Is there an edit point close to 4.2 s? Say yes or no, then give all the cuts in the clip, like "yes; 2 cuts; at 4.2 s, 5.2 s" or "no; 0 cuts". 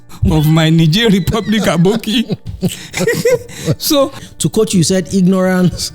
yes; 1 cut; at 4.2 s